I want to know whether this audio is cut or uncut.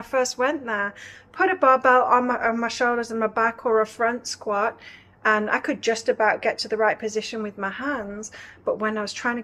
uncut